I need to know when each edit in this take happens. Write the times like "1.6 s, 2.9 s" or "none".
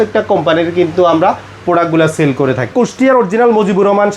2.7 s